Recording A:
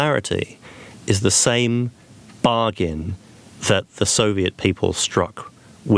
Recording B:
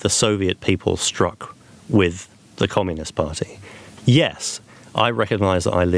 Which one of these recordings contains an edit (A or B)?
B